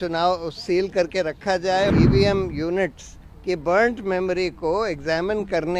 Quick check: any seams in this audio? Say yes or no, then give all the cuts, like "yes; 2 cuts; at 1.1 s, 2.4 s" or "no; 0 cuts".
yes; 1 cut; at 1.9 s